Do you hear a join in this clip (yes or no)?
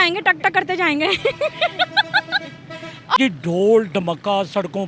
yes